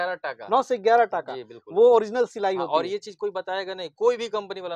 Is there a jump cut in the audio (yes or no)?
no